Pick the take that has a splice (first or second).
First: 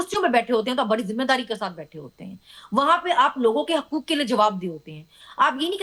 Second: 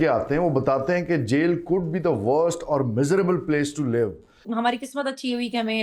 second